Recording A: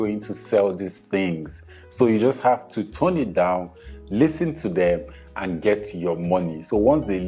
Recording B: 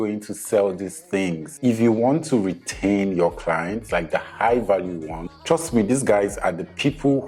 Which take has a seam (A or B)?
B